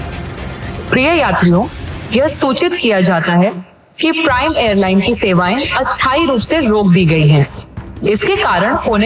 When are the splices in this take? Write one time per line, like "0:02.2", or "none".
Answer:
none

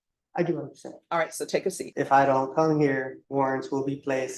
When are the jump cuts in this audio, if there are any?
0:01.8
0:03.2

